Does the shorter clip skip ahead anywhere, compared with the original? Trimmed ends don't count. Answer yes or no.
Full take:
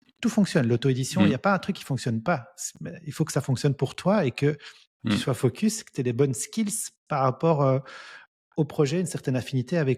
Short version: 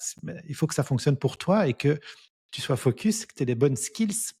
no